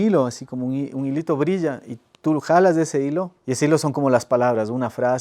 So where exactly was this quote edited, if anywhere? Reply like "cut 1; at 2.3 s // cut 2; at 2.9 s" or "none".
cut 1; at 3.4 s